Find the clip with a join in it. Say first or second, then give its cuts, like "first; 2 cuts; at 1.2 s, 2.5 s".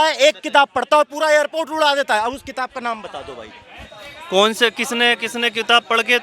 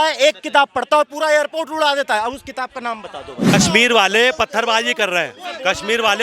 second; 1 cut; at 3.5 s